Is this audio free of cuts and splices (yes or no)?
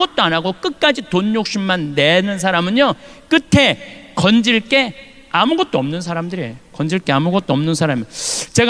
yes